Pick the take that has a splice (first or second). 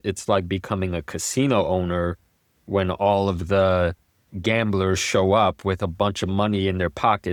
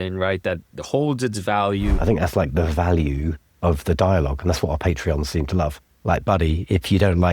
second